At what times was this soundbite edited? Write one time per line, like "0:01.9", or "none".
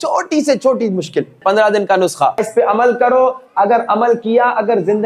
0:01.4
0:02.5

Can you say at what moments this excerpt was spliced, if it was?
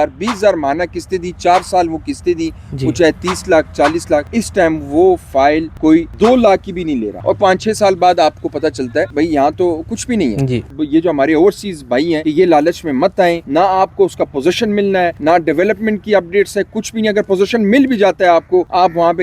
0:07.2
0:10.7
0:13.4

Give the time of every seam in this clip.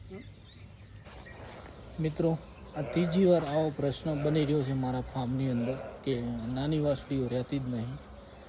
0:01.1

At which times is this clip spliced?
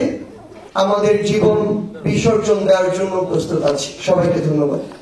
none

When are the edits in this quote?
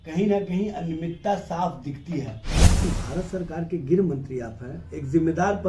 0:02.8

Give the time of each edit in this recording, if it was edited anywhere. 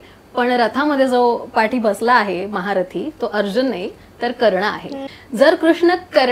0:05.0

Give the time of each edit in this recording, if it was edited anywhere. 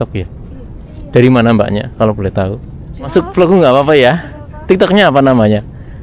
0:03.1

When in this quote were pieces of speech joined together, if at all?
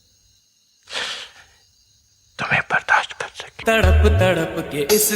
0:03.5

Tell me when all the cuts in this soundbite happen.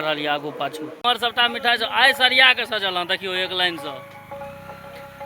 0:01.0

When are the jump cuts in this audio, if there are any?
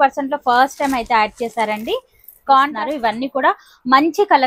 0:02.8

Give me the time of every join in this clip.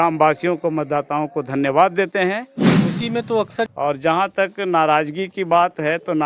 0:03.7

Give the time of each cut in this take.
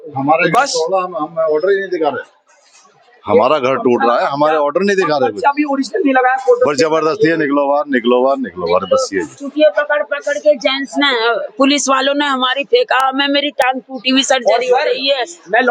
none

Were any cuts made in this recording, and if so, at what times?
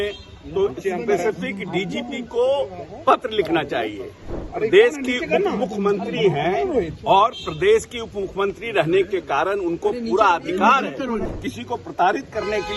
0:11.3

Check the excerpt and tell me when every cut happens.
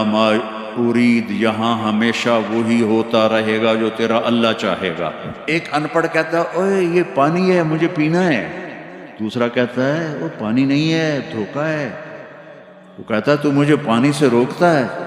0:05.4

